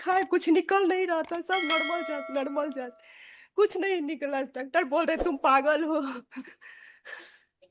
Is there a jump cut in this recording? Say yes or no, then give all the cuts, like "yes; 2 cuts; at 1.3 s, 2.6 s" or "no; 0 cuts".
no; 0 cuts